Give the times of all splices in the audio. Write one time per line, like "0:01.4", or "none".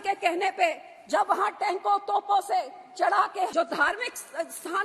0:03.5